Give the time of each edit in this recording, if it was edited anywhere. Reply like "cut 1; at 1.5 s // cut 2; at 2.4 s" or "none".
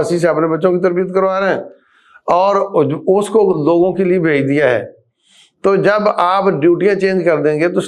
none